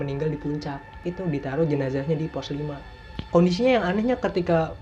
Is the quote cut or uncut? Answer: cut